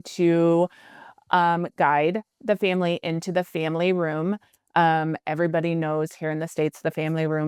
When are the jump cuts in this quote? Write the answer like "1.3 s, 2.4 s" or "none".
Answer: none

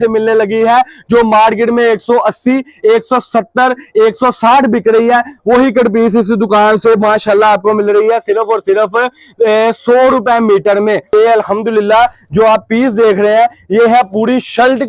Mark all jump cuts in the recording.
11.1 s

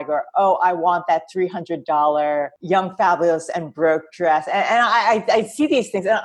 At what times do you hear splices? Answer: 2.5 s

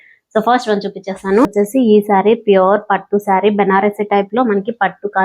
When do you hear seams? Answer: 1.5 s

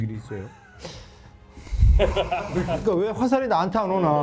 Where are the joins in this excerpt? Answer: none

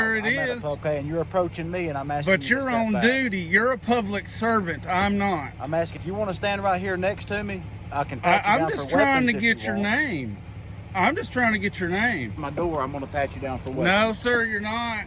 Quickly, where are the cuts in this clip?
0.8 s, 6.0 s, 12.4 s

